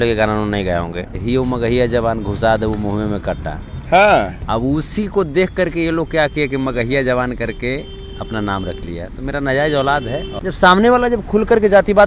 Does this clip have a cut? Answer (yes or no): yes